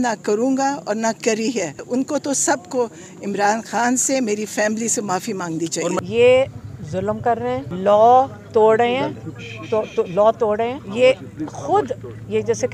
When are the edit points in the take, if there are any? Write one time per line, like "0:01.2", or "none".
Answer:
0:01.8
0:06.0
0:07.7
0:10.8